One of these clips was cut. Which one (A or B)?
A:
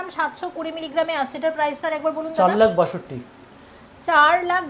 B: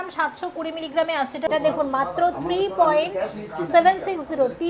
B